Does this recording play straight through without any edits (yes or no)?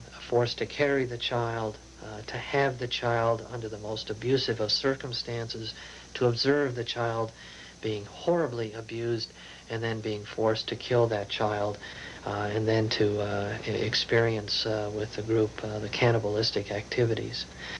no